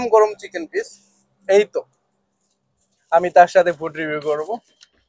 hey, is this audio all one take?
yes; 0 cuts

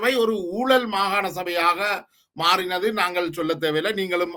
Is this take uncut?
yes; 0 cuts

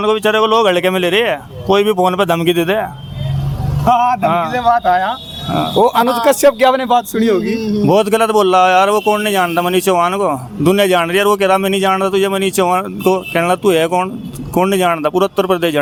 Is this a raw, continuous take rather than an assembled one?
yes; 0 cuts

